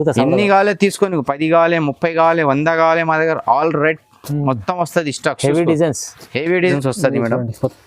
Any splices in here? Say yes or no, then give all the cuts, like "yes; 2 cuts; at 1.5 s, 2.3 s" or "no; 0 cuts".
yes; 1 cut; at 6.7 s